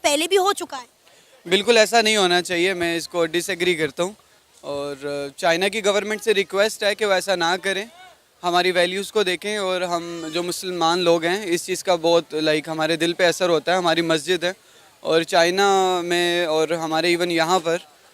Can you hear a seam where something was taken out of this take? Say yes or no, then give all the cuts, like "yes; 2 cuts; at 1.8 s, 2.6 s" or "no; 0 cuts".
no; 0 cuts